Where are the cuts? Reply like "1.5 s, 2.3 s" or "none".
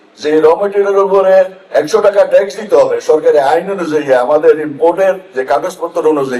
none

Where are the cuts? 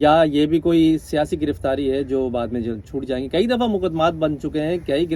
none

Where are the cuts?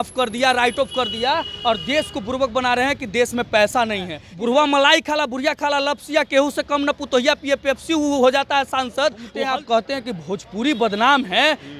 4.2 s, 9.2 s

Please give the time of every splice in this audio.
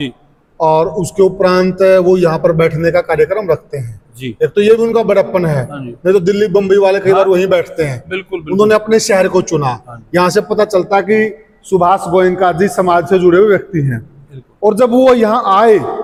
none

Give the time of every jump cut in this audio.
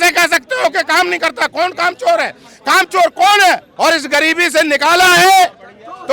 3.7 s

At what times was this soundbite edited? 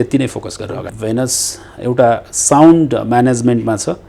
0.9 s

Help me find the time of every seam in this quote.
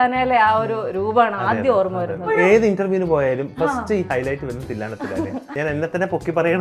2.3 s, 5.5 s

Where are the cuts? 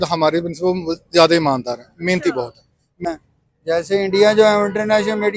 3.0 s

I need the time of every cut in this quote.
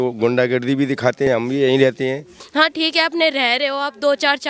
1.2 s, 2.3 s

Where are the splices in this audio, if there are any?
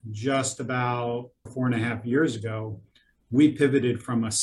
1.5 s

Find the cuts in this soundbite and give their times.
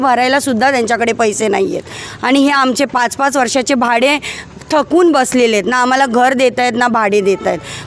none

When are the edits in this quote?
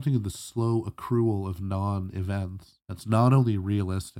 2.7 s

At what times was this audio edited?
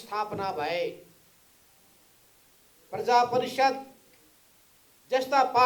none

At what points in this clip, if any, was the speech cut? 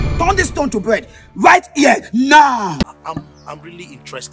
2.8 s

